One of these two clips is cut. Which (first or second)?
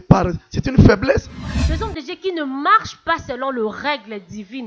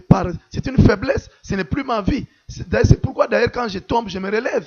first